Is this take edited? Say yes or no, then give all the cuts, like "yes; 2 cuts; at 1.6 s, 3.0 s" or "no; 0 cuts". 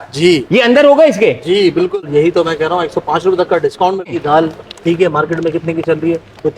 yes; 2 cuts; at 1.9 s, 4.2 s